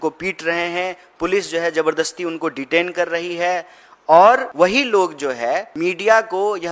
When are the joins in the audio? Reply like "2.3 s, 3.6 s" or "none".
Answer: 4.5 s, 5.7 s